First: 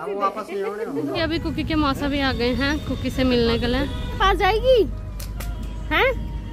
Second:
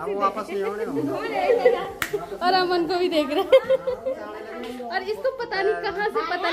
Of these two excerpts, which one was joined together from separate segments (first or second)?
first